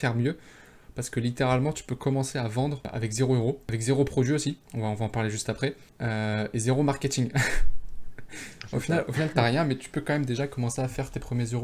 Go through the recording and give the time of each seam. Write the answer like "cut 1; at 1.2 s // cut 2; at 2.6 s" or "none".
cut 1; at 2.9 s // cut 2; at 3.6 s // cut 3; at 4.7 s // cut 4; at 5.9 s